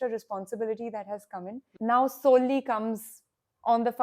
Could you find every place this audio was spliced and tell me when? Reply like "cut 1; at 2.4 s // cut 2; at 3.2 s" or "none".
cut 1; at 1.6 s

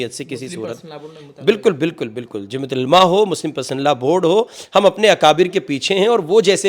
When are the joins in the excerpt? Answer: none

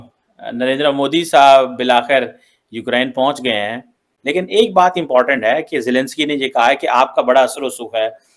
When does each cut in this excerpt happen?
cut 1; at 4.2 s

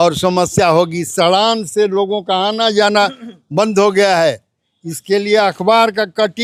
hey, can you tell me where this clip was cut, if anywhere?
none

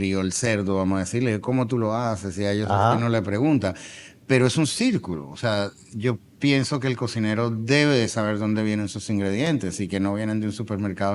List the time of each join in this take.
none

